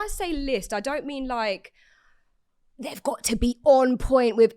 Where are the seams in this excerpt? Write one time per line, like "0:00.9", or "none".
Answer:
none